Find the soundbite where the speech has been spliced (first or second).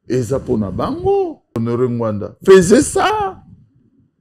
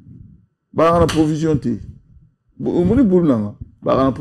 first